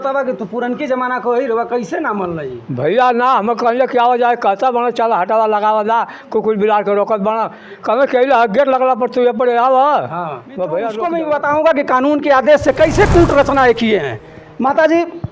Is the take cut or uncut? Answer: cut